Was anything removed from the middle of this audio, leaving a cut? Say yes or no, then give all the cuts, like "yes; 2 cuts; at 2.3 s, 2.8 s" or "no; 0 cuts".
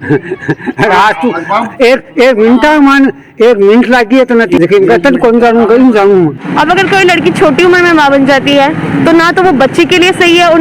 yes; 2 cuts; at 4.6 s, 6.4 s